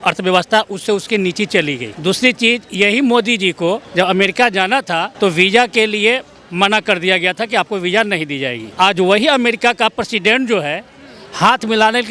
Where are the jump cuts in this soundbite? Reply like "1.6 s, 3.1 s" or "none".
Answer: 1.9 s, 3.9 s, 5.1 s, 8.6 s